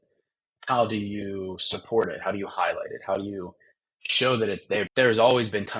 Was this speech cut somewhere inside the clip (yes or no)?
yes